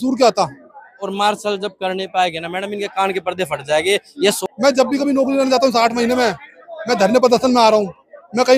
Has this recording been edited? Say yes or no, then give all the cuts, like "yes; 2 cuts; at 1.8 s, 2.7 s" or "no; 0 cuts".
yes; 2 cuts; at 1.0 s, 4.4 s